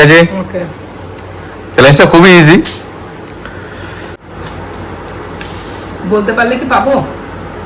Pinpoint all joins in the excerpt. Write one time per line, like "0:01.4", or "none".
0:04.2